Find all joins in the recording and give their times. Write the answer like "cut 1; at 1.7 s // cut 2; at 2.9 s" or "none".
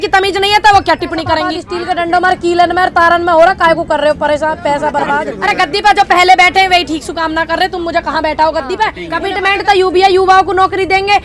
cut 1; at 1.7 s // cut 2; at 5.3 s // cut 3; at 9.1 s